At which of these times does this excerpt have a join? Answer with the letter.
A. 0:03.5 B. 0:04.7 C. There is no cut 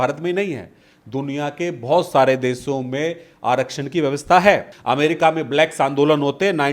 B